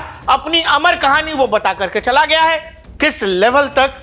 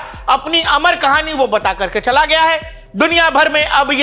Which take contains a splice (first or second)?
first